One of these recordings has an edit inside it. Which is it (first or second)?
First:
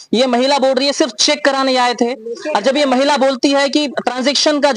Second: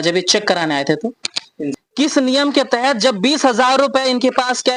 second